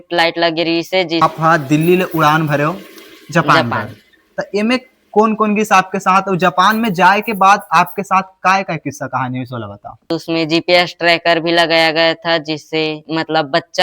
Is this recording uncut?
no; 2 cuts; at 1.2 s, 10.1 s

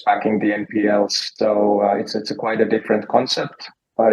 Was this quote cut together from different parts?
yes; 1 cut; at 1.2 s

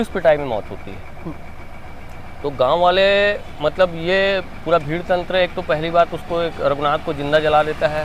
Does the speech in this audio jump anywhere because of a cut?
no; 0 cuts

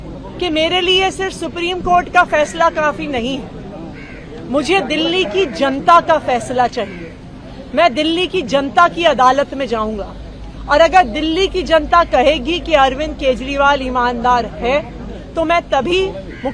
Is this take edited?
no; 0 cuts

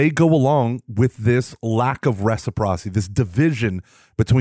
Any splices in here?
no; 0 cuts

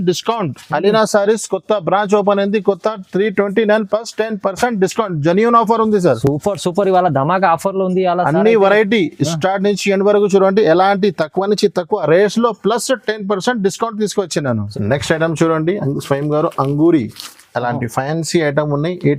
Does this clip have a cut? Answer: no; 0 cuts

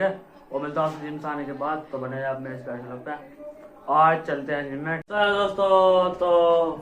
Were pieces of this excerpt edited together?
yes; 1 cut; at 5.0 s

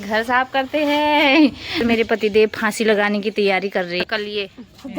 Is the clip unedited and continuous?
no; 2 cuts; at 1.8 s, 4.0 s

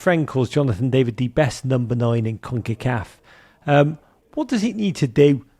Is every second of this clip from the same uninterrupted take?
yes; 0 cuts

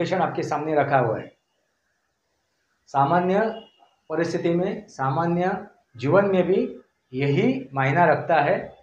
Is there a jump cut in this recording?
no; 0 cuts

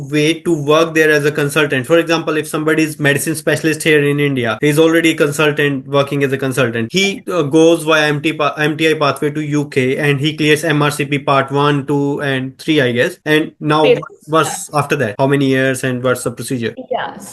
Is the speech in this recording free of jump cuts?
yes; 0 cuts

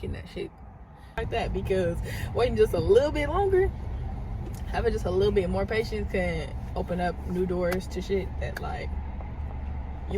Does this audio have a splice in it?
yes; 1 cut; at 1.2 s

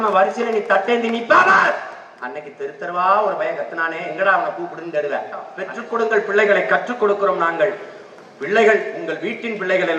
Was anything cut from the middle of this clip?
yes; 1 cut; at 5.6 s

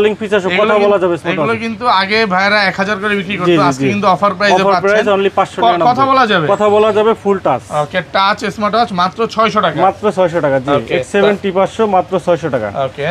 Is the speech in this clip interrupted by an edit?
no; 0 cuts

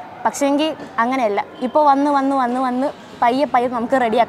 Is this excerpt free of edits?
yes; 0 cuts

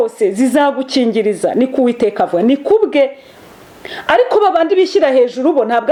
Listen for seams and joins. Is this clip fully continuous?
yes; 0 cuts

